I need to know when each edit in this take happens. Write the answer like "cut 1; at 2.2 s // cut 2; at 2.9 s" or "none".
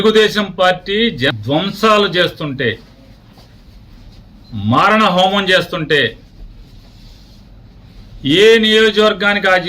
cut 1; at 1.4 s

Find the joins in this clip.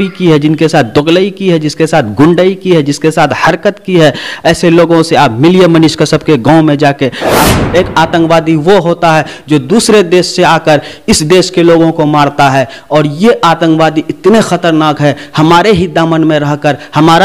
cut 1; at 7.5 s

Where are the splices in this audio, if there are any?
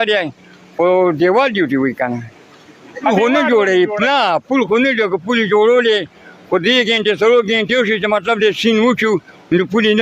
cut 1; at 3.1 s

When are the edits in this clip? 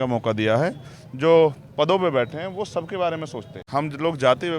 cut 1; at 3.6 s

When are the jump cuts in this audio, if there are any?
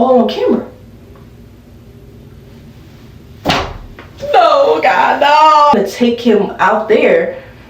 cut 1; at 5.7 s

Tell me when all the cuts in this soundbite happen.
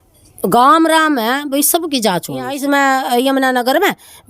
cut 1; at 2.6 s

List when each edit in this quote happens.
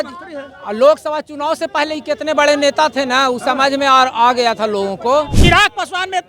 cut 1; at 5.3 s

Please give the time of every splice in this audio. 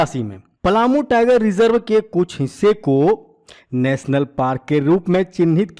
none

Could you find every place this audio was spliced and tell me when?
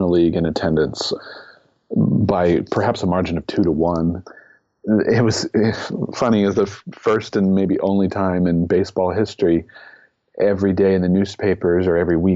cut 1; at 1.1 s // cut 2; at 4.3 s

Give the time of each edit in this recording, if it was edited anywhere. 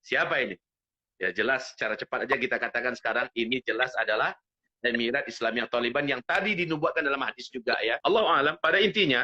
cut 1; at 8.0 s

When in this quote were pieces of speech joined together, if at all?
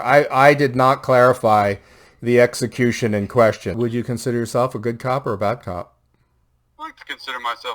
cut 1; at 3.7 s

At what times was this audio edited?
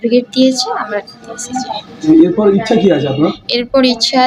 none

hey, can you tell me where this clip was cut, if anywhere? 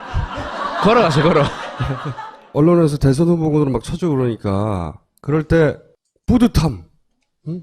cut 1; at 3.2 s

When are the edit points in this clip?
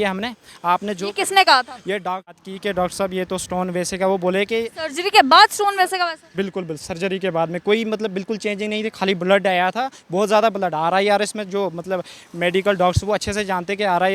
cut 1; at 2.4 s

